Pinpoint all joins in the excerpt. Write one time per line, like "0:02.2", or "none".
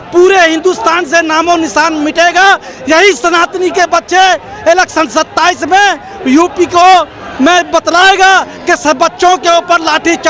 none